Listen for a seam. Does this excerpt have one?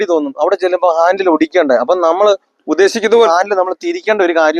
yes; 1 cut; at 3.3 s

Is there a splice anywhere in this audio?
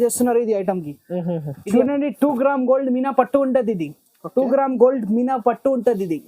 yes; 1 cut; at 1.5 s

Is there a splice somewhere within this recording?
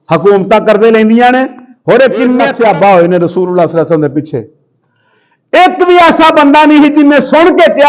yes; 1 cut; at 2.5 s

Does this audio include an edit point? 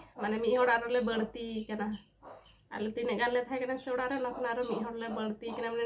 no; 0 cuts

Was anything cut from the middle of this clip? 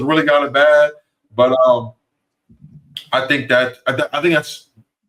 no; 0 cuts

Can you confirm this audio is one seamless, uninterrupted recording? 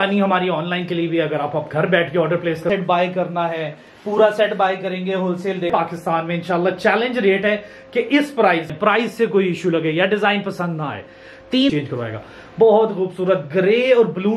no; 4 cuts; at 2.7 s, 5.7 s, 8.7 s, 11.7 s

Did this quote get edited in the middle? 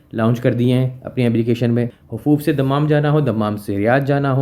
yes; 1 cut; at 2.0 s

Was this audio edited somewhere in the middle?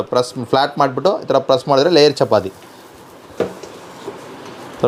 no; 0 cuts

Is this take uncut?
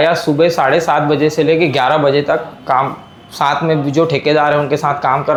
yes; 0 cuts

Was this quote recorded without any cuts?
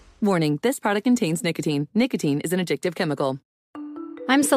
no; 1 cut; at 3.5 s

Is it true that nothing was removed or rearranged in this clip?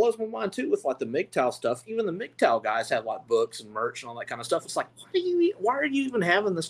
yes; 0 cuts

